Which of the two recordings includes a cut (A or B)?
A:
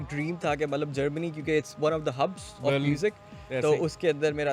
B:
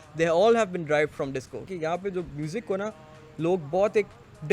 B